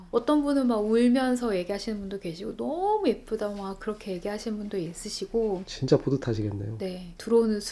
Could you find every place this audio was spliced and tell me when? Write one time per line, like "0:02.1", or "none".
none